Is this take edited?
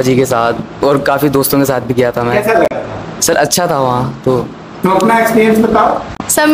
no; 0 cuts

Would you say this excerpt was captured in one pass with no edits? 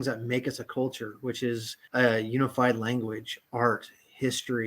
no; 1 cut; at 1.8 s

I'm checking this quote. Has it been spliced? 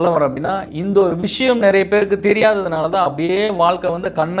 no; 0 cuts

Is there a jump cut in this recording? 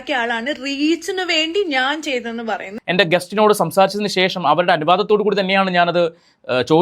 yes; 1 cut; at 2.7 s

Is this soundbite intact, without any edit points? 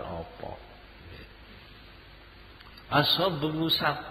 no; 1 cut; at 1.4 s

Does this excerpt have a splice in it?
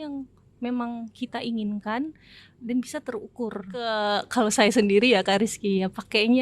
yes; 1 cut; at 3.9 s

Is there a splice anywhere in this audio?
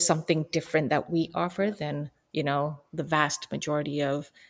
no; 0 cuts

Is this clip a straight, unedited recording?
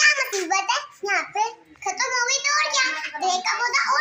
yes; 0 cuts

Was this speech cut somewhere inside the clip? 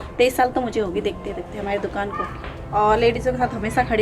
yes; 1 cut; at 2.6 s

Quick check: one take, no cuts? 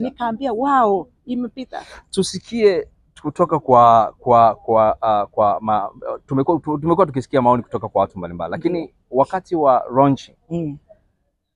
yes; 0 cuts

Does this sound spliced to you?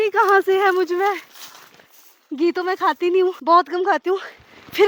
no; 0 cuts

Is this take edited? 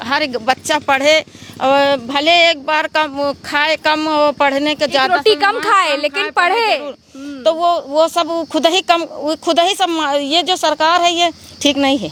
no; 0 cuts

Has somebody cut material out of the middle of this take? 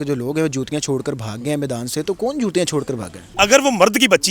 yes; 1 cut; at 3.2 s

